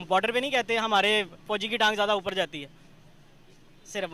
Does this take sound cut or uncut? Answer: uncut